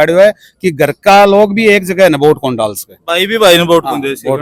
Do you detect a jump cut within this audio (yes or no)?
no